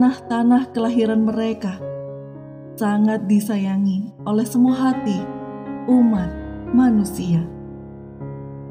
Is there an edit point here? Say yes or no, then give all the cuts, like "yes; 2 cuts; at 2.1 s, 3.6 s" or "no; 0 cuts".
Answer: yes; 1 cut; at 7.6 s